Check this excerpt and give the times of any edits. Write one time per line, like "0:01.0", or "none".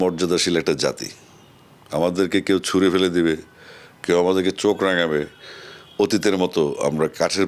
none